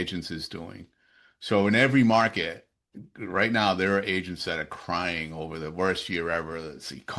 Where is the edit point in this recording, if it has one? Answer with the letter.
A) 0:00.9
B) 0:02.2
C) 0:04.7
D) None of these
D